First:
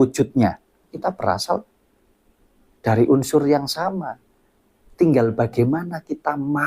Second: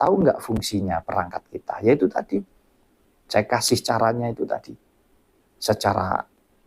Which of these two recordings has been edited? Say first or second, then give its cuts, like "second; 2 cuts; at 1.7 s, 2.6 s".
first; 1 cut; at 0.9 s